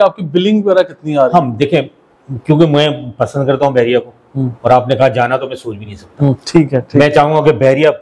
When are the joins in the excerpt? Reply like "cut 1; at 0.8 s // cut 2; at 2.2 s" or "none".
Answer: none